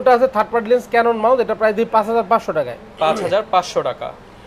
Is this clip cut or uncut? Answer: uncut